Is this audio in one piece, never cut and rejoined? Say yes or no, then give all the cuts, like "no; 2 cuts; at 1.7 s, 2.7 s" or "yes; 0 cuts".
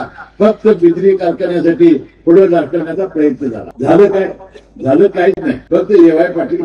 no; 2 cuts; at 3.7 s, 5.5 s